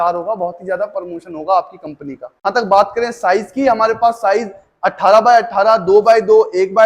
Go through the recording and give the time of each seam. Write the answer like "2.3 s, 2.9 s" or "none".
2.4 s

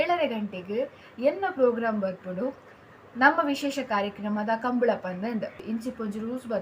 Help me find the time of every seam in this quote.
5.6 s

